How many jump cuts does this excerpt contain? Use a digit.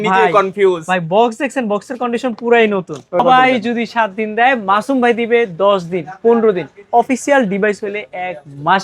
1